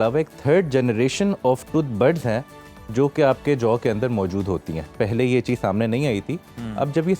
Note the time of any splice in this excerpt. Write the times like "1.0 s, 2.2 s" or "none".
none